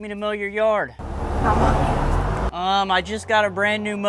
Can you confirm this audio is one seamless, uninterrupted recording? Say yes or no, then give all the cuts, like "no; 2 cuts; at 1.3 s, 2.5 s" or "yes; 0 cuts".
yes; 0 cuts